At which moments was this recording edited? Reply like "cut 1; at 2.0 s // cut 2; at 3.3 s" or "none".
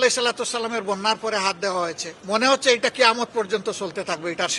cut 1; at 2.1 s